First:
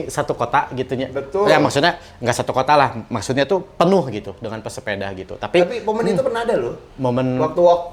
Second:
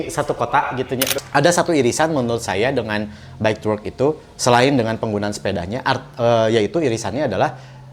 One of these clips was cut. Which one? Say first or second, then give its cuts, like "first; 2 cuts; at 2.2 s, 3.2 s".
second; 1 cut; at 1.2 s